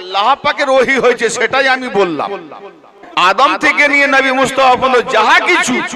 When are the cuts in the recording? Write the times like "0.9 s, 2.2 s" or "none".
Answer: 3.0 s